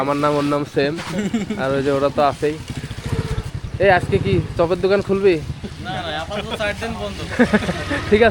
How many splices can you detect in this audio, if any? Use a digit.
0